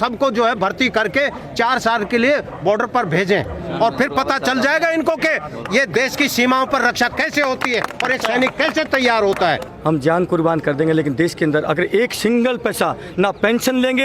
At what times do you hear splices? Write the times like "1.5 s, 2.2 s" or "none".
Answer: 9.7 s

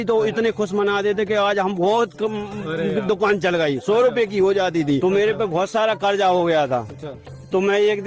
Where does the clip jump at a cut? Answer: 5.0 s

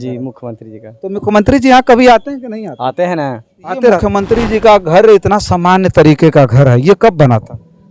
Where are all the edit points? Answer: 4.0 s

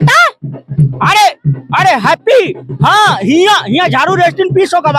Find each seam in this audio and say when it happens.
none

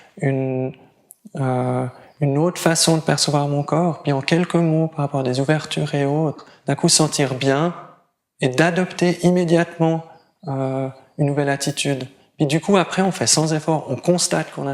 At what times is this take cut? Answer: 4.2 s

